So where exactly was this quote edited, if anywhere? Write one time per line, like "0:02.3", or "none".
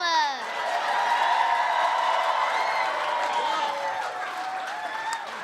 0:01.6